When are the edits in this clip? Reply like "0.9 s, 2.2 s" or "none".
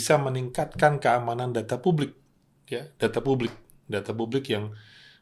none